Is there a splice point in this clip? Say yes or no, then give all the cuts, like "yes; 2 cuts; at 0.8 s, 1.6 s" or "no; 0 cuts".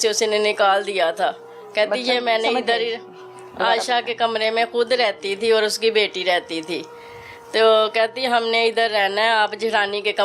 no; 0 cuts